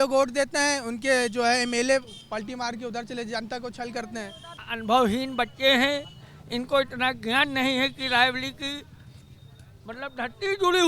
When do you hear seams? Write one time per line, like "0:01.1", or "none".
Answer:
0:04.4